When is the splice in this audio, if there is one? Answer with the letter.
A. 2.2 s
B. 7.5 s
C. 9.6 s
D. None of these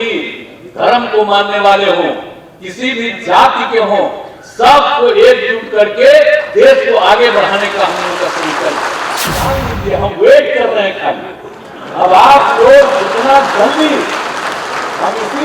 C